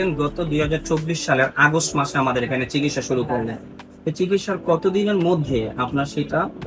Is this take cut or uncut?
uncut